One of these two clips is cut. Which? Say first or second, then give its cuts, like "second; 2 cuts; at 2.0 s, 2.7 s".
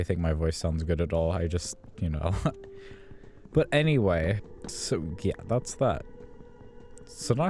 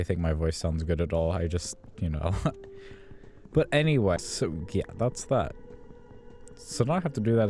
second; 1 cut; at 4.2 s